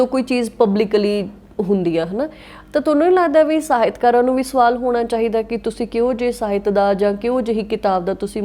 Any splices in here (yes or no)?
no